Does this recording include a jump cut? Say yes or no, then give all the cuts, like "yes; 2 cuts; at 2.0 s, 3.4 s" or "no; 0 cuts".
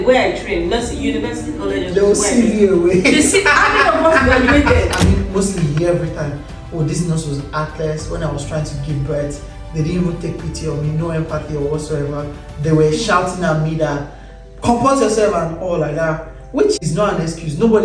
yes; 2 cuts; at 5.1 s, 16.8 s